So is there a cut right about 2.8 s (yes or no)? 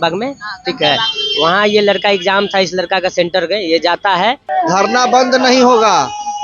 no